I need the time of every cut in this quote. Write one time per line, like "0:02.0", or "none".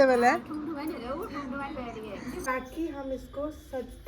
0:02.5